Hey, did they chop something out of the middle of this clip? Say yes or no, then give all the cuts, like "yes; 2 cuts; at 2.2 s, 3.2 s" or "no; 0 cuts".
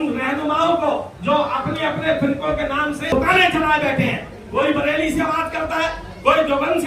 yes; 1 cut; at 3.1 s